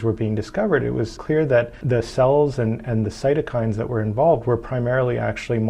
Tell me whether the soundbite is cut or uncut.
cut